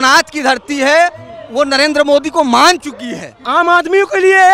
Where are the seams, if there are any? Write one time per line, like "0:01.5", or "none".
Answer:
0:03.4